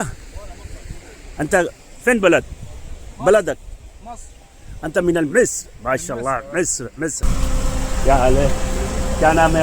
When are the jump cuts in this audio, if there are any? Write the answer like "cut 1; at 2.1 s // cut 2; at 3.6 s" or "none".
cut 1; at 7.2 s